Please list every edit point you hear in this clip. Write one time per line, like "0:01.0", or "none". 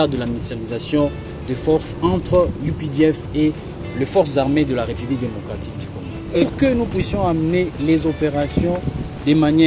none